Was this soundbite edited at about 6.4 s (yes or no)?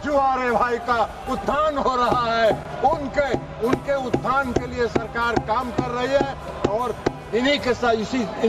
no